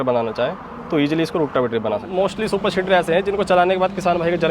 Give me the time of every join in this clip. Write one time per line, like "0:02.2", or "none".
0:02.1